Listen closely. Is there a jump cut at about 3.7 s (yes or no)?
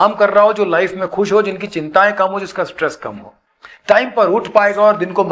no